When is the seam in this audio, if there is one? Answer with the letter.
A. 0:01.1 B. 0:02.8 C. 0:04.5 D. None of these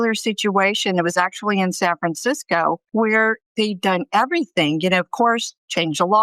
B